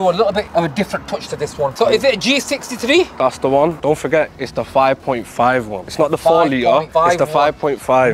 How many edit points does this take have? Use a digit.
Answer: 2